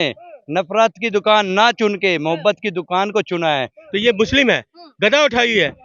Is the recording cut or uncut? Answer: cut